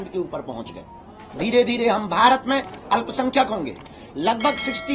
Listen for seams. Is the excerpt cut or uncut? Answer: uncut